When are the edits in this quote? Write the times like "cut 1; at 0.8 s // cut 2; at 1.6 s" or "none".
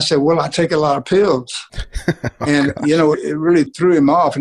cut 1; at 3.5 s